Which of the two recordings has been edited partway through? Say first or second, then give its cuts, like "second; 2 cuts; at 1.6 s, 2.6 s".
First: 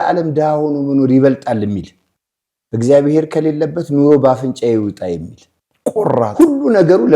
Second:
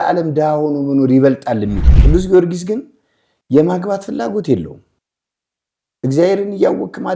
second; 1 cut; at 1.9 s